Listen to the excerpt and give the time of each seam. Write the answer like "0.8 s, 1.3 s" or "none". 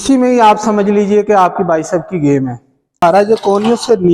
3.0 s